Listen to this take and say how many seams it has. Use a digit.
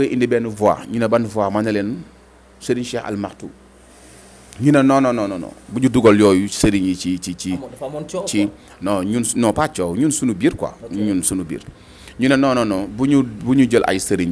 0